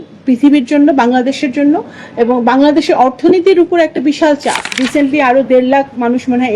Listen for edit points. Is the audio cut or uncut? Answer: cut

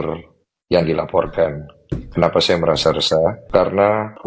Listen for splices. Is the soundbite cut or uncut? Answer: uncut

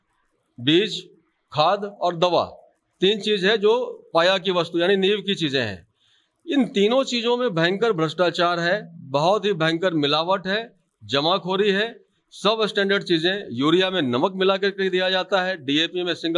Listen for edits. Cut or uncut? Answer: uncut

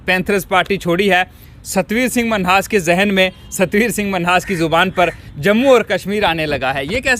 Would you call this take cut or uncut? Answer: uncut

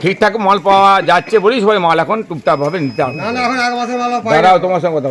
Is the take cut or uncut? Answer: uncut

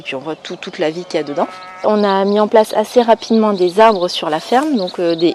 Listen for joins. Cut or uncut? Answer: cut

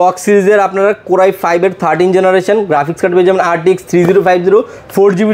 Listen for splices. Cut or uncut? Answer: uncut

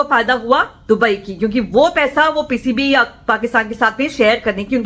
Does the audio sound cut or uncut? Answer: uncut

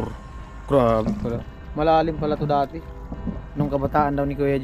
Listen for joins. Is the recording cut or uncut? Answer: uncut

